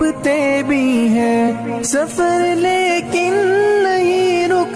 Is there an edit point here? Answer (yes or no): no